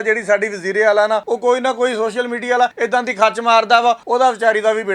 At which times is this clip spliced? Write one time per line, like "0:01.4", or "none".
0:01.2
0:02.7
0:04.0